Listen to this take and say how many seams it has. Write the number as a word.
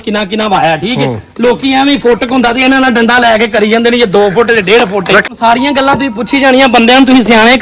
one